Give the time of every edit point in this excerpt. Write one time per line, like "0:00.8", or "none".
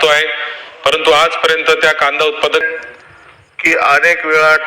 0:02.7